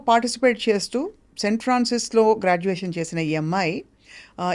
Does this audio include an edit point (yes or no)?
no